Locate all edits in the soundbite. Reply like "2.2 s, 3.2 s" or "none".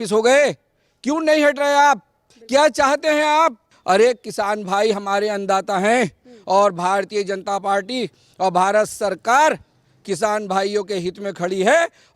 3.7 s